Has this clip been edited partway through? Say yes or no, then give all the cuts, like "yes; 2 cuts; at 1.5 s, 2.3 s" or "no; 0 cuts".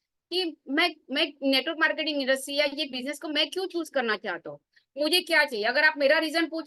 no; 0 cuts